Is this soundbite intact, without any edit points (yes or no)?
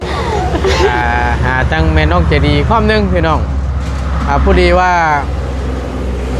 no